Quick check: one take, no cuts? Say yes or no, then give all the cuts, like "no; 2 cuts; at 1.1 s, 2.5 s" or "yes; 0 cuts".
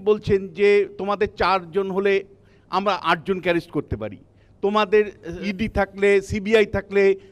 yes; 0 cuts